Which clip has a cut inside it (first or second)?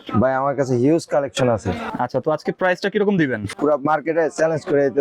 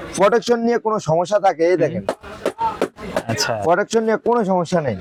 first